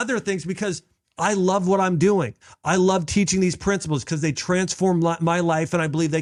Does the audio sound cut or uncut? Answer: uncut